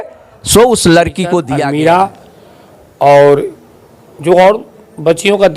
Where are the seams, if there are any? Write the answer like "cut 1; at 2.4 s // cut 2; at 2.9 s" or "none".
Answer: cut 1; at 1.5 s